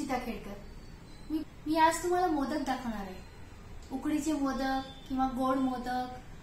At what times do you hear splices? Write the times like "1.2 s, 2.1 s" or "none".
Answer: 1.4 s